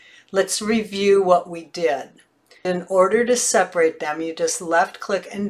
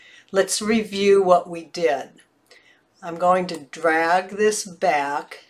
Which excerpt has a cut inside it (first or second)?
first